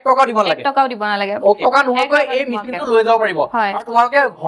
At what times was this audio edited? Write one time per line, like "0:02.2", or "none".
0:01.6